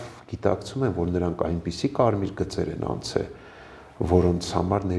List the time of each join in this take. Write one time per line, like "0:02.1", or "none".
none